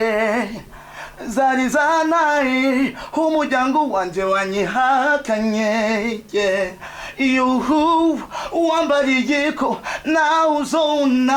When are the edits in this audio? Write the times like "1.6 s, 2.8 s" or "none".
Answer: none